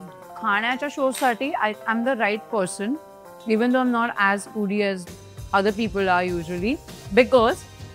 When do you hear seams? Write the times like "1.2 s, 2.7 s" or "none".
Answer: 6.9 s

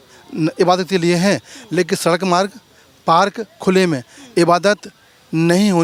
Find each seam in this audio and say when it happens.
none

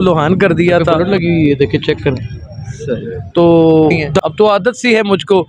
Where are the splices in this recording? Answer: 1.0 s, 4.1 s

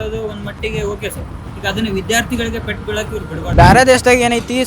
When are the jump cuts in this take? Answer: 3.4 s

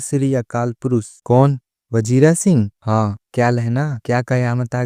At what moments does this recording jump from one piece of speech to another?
1.1 s

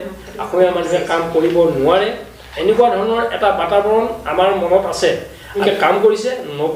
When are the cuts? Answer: 5.6 s

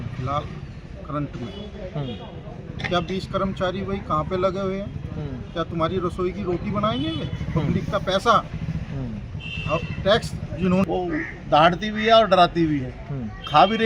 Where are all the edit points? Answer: 10.8 s

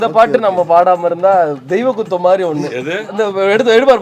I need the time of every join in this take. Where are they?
3.0 s

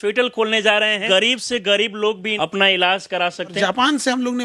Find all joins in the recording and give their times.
1.0 s, 2.3 s, 3.5 s

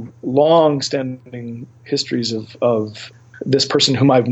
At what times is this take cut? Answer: 3.0 s

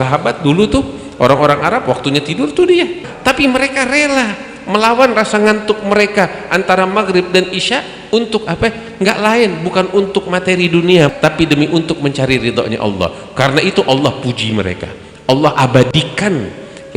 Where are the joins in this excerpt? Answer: 3.1 s, 11.1 s

